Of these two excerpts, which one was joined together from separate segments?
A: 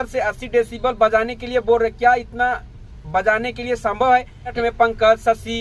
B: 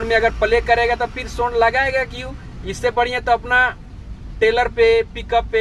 A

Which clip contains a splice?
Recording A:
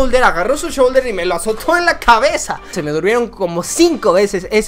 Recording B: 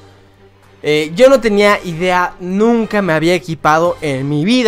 A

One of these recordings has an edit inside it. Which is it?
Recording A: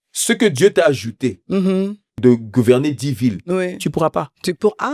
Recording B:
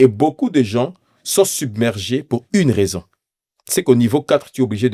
A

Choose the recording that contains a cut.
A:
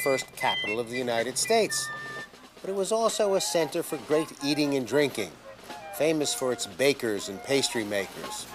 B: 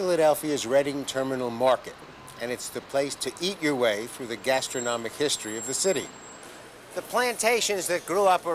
A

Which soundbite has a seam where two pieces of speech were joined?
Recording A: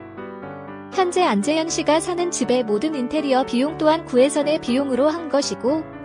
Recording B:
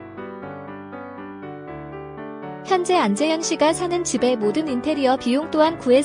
A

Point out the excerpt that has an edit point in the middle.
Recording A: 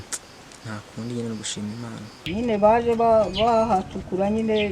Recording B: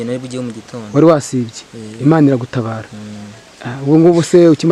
A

